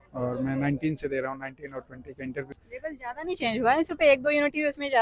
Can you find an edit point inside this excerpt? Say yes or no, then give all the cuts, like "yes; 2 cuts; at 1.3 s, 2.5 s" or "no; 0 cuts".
yes; 1 cut; at 2.9 s